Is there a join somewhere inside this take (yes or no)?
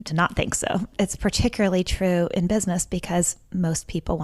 yes